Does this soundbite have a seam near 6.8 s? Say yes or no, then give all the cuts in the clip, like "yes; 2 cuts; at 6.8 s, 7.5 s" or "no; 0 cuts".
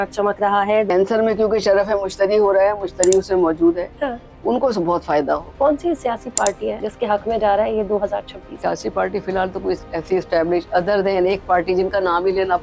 yes; 4 cuts; at 0.9 s, 5.5 s, 6.8 s, 8.5 s